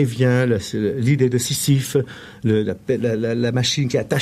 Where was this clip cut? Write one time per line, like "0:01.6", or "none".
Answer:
none